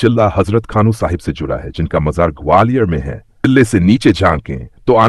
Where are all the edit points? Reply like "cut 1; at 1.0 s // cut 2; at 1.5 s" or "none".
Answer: cut 1; at 3.4 s